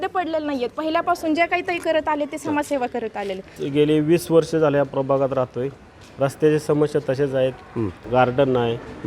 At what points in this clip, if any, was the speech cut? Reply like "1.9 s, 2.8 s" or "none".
3.6 s, 8.0 s